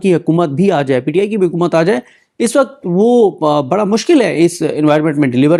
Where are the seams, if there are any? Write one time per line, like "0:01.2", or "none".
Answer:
none